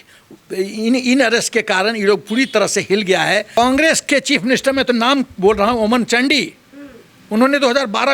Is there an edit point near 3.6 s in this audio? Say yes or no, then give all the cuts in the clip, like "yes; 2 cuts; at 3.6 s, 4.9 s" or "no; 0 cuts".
yes; 1 cut; at 3.6 s